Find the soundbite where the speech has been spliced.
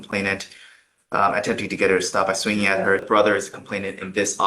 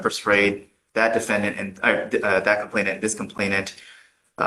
first; 1 cut; at 3.0 s

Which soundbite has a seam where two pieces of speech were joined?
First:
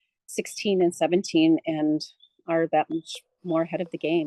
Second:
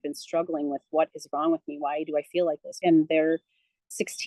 second; 1 cut; at 2.7 s

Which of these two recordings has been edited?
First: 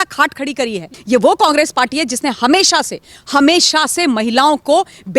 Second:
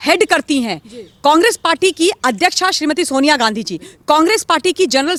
first; 1 cut; at 0.9 s

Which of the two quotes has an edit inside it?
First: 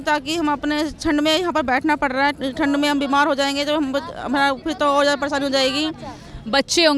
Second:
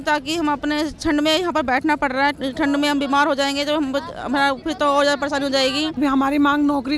second; 1 cut; at 6.0 s

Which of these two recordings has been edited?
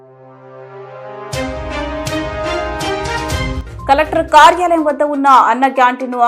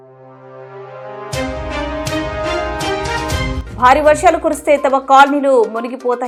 first; 1 cut; at 3.6 s

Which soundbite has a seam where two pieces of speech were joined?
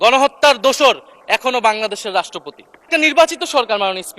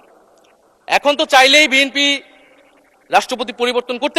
first; 1 cut; at 2.9 s

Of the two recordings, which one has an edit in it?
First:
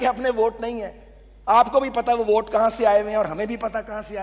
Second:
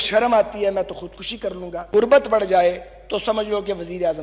second; 1 cut; at 2.1 s

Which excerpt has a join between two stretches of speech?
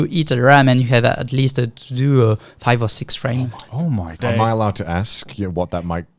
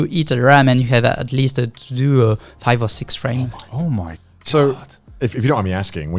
first; 1 cut; at 4.2 s

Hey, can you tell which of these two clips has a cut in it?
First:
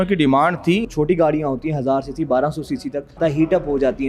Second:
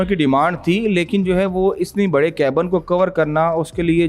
first; 2 cuts; at 0.8 s, 3.2 s

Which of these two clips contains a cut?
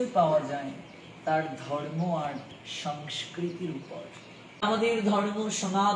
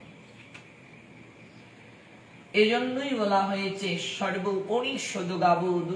first; 1 cut; at 4.7 s

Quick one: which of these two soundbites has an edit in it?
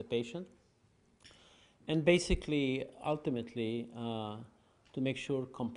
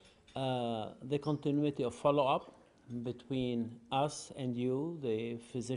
second; 1 cut; at 4.3 s

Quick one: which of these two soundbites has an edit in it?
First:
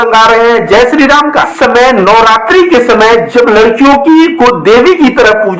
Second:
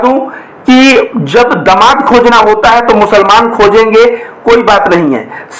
first; 1 cut; at 1.5 s

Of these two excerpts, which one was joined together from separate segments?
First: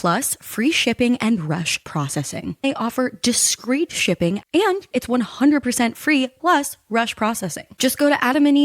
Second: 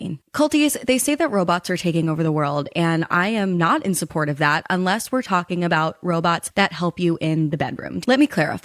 first; 3 cuts; at 2.6 s, 4.4 s, 7.7 s

